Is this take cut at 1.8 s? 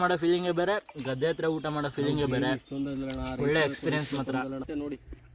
no; 1 cut; at 4.4 s

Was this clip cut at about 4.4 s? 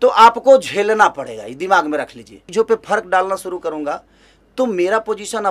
no; 1 cut; at 2.4 s

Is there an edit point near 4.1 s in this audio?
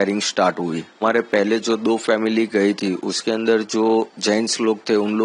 no; 1 cut; at 1.0 s

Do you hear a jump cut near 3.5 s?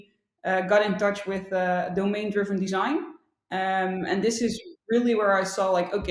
no; 0 cuts

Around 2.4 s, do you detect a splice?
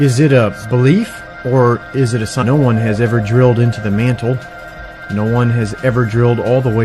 no; 0 cuts

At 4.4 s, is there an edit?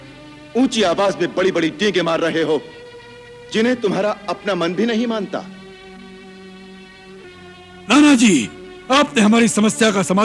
no; 1 cut; at 7.2 s

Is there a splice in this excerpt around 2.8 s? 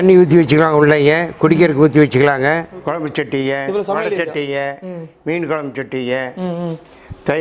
yes; 1 cut; at 2.8 s

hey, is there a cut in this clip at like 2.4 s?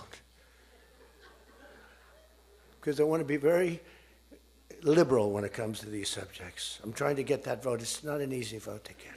no; 0 cuts

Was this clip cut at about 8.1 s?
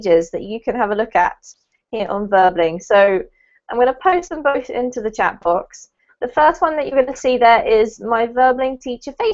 no; 1 cut; at 6.6 s

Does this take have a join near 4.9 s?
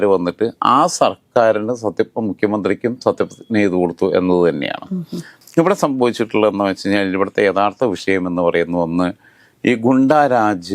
no; 0 cuts

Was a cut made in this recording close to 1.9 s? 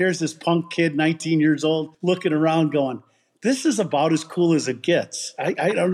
yes; 1 cut; at 1.9 s

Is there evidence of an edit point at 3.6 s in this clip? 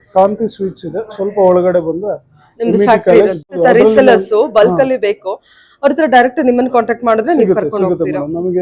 yes; 1 cut; at 3.6 s

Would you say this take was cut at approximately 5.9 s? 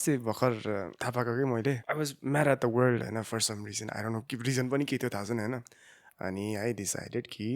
no; 2 cuts; at 1.0 s, 1.9 s

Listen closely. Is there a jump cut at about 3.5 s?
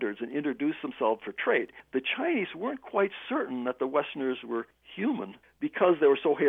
no; 2 cuts; at 1.7 s, 5.0 s

